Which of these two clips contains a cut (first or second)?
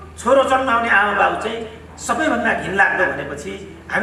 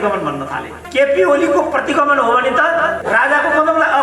second